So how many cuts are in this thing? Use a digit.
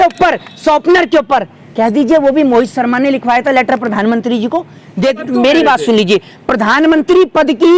1